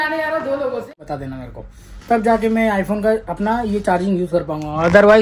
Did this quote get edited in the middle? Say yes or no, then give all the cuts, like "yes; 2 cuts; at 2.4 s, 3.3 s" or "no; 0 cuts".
yes; 1 cut; at 1.1 s